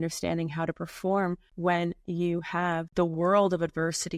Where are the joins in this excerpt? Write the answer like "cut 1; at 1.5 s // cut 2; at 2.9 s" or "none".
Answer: cut 1; at 1.5 s // cut 2; at 2.9 s